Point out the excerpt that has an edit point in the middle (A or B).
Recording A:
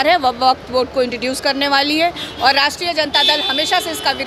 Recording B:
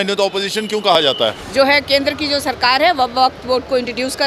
B